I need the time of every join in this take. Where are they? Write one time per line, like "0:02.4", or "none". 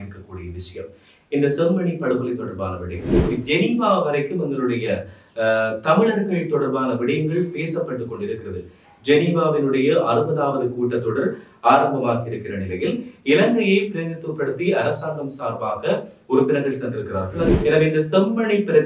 0:03.2
0:17.5